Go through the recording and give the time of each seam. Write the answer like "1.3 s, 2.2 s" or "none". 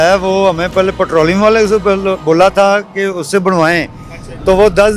none